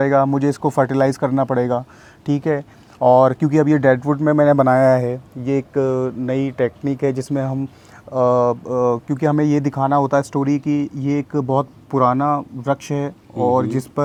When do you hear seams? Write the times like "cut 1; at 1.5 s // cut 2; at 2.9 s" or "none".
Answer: none